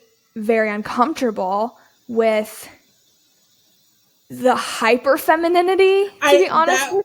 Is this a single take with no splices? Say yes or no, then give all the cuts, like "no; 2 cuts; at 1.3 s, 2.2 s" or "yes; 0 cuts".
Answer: yes; 0 cuts